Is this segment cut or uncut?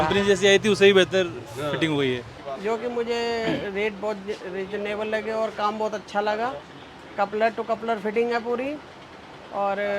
cut